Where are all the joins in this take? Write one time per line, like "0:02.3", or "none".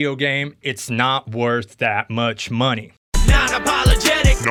none